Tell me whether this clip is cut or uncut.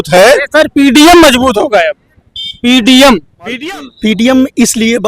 cut